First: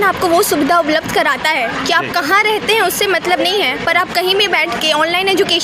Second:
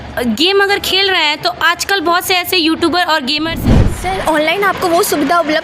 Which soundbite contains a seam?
second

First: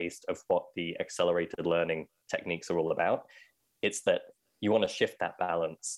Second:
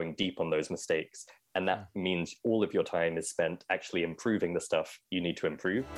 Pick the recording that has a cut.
second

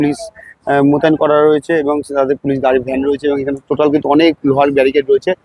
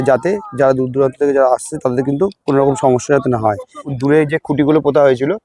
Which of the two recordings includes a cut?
second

